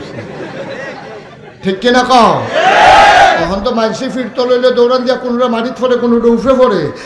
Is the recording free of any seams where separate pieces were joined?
yes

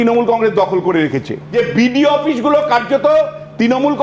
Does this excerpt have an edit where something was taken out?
yes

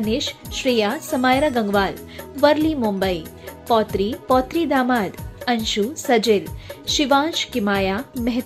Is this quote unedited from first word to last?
no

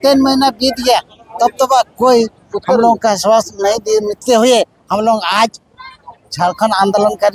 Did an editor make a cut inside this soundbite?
no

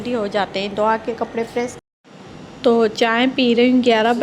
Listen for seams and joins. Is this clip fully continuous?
no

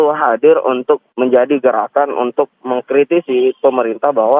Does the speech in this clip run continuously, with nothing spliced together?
no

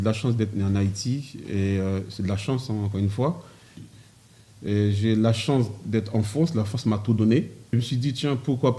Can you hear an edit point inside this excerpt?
yes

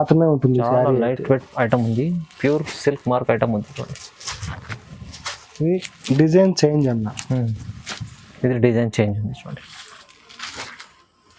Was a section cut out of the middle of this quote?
no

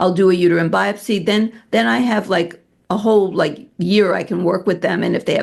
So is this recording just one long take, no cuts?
yes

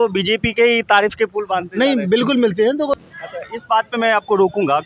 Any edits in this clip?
yes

